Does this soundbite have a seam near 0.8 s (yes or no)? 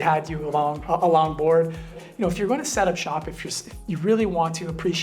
yes